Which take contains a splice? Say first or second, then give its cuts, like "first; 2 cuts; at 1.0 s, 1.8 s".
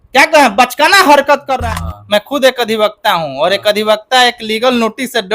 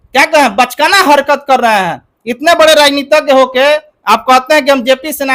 first; 1 cut; at 1.5 s